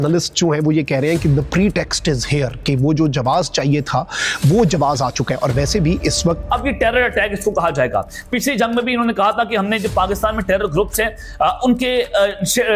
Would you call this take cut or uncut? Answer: cut